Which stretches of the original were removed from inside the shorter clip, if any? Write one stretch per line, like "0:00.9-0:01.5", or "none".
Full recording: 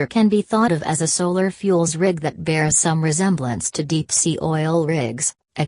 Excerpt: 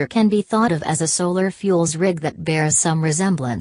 none